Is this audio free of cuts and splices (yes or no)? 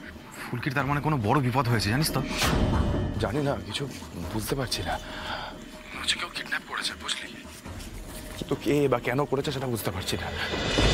no